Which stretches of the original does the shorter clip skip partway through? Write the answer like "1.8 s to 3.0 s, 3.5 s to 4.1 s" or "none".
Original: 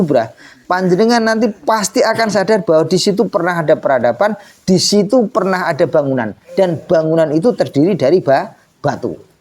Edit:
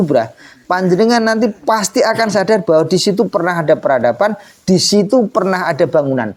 none